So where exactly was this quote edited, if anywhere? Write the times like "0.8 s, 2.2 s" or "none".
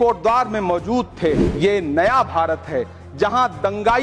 1.5 s